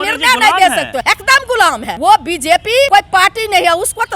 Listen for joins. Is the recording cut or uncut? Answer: cut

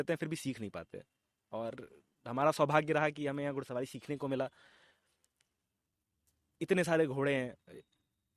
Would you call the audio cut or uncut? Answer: uncut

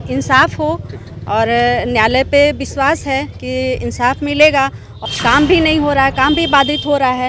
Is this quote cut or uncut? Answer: cut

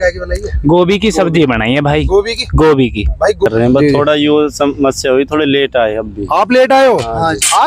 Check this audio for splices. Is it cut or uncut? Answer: cut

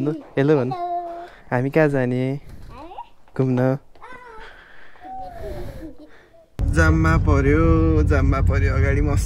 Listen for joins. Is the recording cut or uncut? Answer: cut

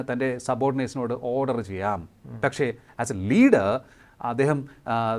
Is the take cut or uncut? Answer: uncut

